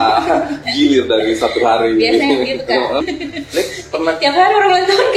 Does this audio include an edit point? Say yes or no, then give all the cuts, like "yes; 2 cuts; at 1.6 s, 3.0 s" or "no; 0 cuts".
yes; 1 cut; at 3.0 s